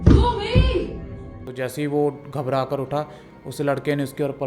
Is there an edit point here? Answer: yes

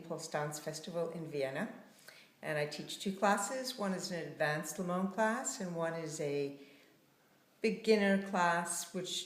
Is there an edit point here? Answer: yes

